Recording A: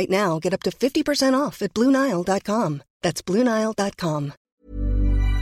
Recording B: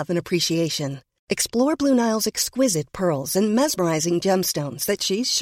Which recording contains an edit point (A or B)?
A